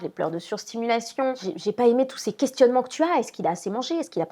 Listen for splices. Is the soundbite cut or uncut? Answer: uncut